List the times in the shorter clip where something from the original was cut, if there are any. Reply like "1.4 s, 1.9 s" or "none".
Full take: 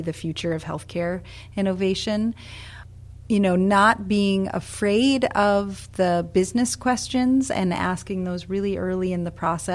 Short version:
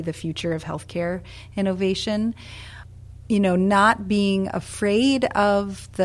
none